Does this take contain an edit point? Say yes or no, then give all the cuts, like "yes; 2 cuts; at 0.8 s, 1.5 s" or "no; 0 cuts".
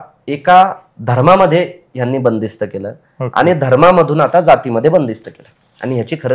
no; 0 cuts